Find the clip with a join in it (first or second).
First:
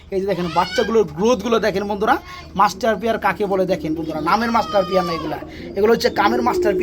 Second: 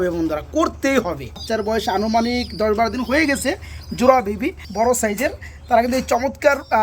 second